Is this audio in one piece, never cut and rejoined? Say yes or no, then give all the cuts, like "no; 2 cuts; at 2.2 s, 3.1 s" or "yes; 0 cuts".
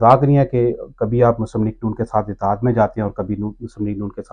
yes; 0 cuts